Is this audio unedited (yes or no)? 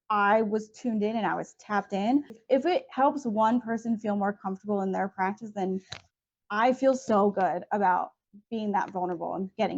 no